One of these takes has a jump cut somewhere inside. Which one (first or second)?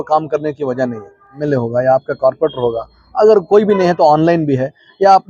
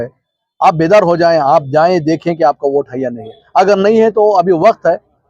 first